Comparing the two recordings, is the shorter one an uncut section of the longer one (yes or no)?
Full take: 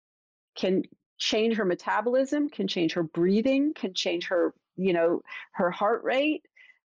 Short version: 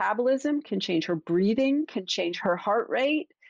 no